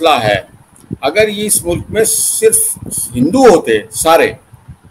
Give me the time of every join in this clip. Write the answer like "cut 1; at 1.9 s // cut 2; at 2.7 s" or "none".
none